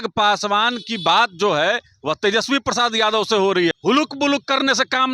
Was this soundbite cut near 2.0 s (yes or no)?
no